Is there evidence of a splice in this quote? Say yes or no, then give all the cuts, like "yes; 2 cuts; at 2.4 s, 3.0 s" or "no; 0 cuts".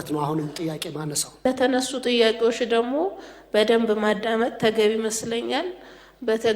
yes; 1 cut; at 1.3 s